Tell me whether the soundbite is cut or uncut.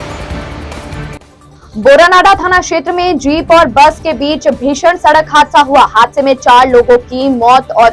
cut